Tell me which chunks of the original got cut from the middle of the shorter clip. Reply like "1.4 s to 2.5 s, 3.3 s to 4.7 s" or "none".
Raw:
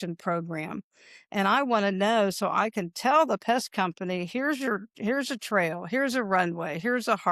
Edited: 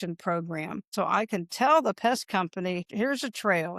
0.9 s to 2.4 s, 4.3 s to 4.9 s

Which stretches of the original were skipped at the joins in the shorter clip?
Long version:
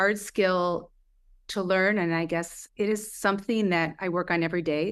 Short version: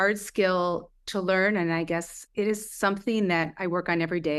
1.0 s to 1.4 s

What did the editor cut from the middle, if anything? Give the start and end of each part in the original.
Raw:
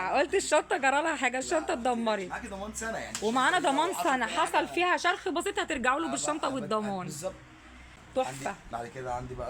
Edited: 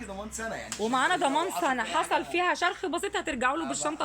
none

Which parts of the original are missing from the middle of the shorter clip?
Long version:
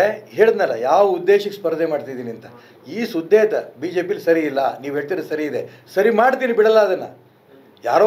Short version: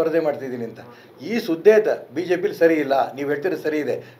none

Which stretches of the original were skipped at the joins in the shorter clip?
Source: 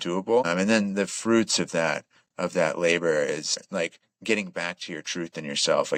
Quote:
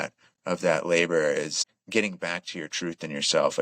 3.6 s to 4.0 s

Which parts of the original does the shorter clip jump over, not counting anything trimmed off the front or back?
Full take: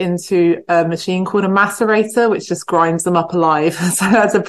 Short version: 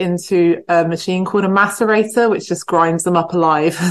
none

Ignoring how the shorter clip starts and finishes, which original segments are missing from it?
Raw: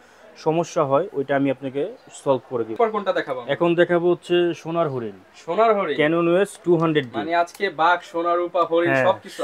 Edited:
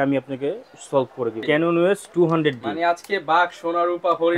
2.8 s to 5.9 s

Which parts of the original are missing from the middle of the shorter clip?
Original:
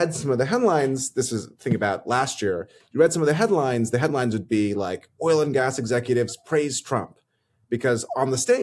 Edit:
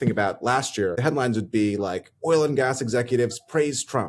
2.6 s to 4.0 s

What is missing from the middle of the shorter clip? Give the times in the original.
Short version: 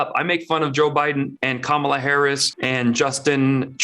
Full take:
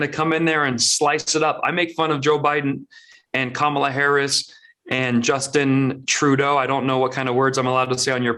2.8 s to 3.3 s, 4.4 s to 4.8 s

